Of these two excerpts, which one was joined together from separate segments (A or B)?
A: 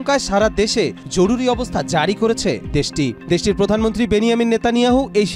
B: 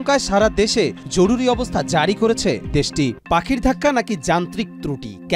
B